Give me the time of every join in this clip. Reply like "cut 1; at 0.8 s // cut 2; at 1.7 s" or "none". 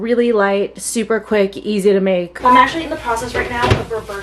cut 1; at 2.4 s